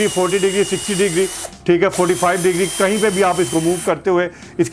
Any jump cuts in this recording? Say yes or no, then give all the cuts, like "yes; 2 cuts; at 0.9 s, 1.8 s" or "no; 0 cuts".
no; 0 cuts